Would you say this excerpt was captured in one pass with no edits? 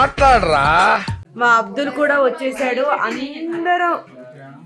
no; 1 cut; at 1.2 s

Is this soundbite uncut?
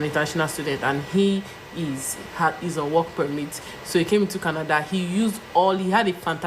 yes; 0 cuts

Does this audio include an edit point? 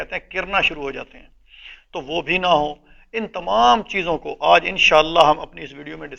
no; 0 cuts

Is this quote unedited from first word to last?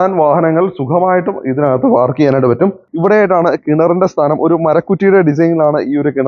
no; 1 cut; at 2.8 s

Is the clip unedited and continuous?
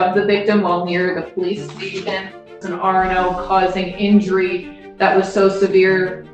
no; 1 cut; at 2.6 s

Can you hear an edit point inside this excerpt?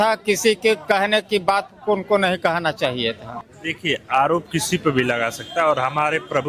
yes; 1 cut; at 3.5 s

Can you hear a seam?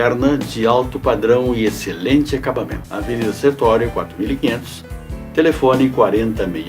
yes; 1 cut; at 2.8 s

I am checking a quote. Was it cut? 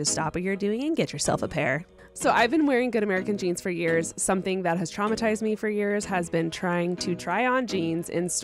no; 0 cuts

